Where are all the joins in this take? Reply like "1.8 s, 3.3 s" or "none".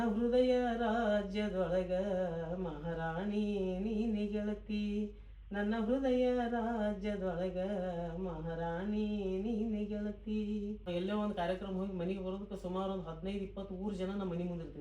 10.9 s